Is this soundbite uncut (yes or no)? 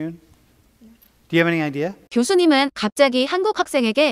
yes